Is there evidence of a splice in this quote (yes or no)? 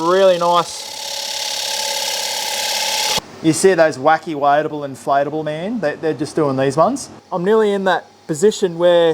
yes